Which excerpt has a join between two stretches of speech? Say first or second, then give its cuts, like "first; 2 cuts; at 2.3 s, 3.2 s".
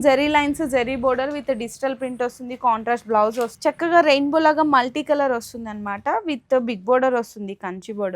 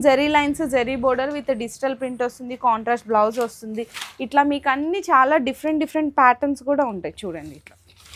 first; 1 cut; at 3.5 s